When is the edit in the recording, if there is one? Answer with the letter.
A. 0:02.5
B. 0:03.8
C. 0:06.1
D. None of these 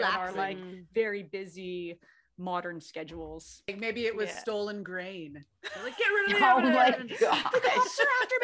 B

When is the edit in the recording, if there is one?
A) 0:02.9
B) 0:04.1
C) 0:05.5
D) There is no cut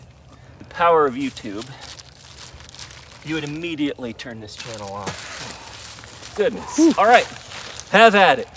C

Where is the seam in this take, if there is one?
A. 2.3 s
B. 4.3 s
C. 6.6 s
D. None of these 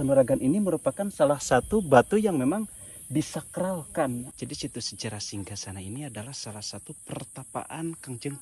B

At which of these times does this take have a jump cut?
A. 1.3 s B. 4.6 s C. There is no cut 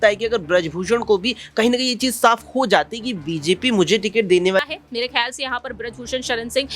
B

